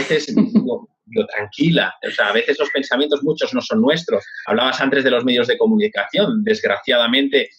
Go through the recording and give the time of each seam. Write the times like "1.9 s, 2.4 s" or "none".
4.3 s